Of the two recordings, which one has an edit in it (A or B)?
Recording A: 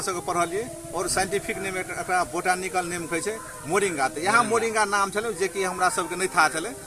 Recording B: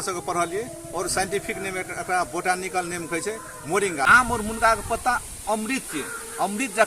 B